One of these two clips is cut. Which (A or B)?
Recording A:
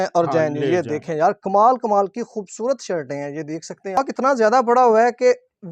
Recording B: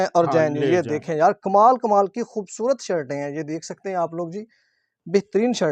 A